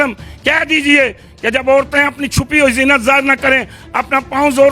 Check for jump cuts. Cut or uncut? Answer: uncut